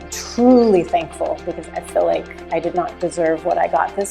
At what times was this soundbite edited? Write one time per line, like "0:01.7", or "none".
0:01.7